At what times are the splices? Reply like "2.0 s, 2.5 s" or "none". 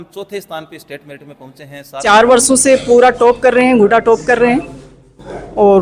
2.0 s